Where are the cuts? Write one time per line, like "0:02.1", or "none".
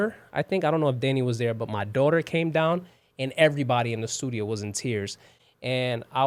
none